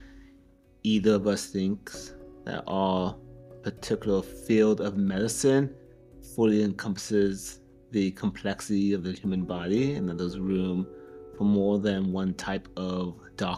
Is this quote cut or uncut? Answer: uncut